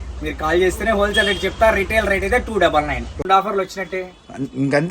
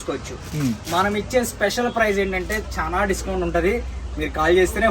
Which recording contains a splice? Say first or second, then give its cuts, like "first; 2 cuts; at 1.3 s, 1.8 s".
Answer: first; 1 cut; at 3.1 s